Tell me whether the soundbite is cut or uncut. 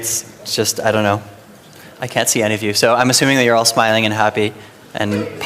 uncut